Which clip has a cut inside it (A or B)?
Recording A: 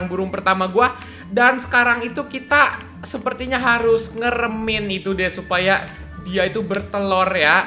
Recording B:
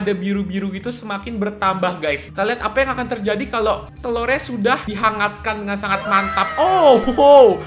B